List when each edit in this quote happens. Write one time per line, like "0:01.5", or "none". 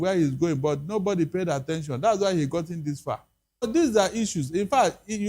0:03.6

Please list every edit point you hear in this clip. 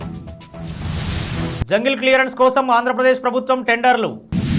none

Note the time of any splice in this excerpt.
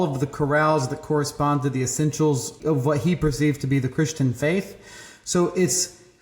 0:02.6

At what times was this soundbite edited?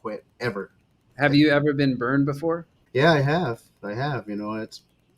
0:01.1
0:02.7

